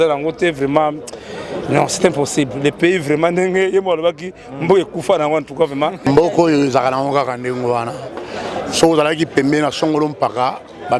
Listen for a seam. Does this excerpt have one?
yes; 1 cut; at 6.1 s

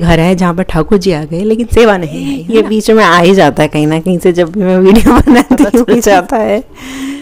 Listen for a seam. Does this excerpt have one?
yes; 2 cuts; at 2.4 s, 6.1 s

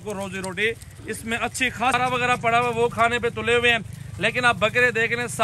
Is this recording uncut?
no; 1 cut; at 1.9 s

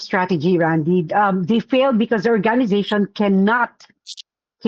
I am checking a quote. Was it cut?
no; 0 cuts

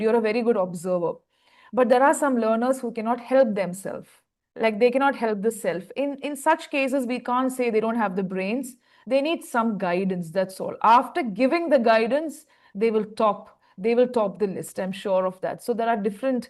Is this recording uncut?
yes; 0 cuts

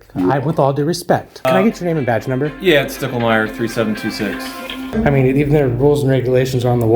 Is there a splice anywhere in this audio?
yes; 2 cuts; at 1.4 s, 4.8 s

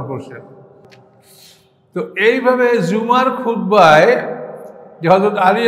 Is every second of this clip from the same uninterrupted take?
no; 1 cut; at 0.9 s

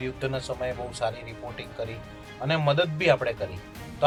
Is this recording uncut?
yes; 0 cuts

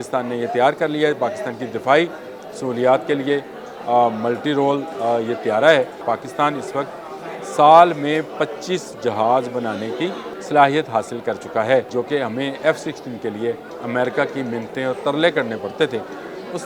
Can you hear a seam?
yes; 4 cuts; at 6.0 s, 10.3 s, 11.9 s, 13.7 s

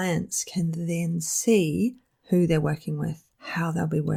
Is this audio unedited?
yes; 0 cuts

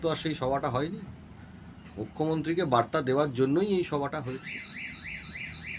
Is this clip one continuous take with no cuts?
yes; 0 cuts

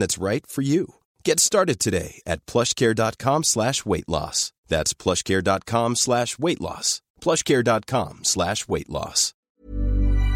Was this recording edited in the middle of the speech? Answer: yes; 1 cut; at 9.4 s

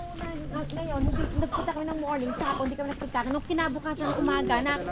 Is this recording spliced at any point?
no; 0 cuts

